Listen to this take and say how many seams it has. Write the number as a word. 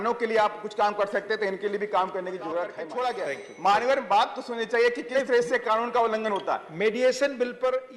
one